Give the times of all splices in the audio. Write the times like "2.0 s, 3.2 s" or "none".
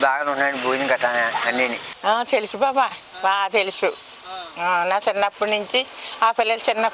1.9 s